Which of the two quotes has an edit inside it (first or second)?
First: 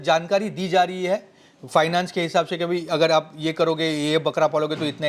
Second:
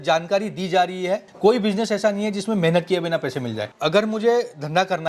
second